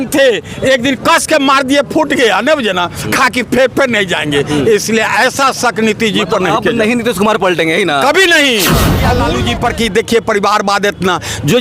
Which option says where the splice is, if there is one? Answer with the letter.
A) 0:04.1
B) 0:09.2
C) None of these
B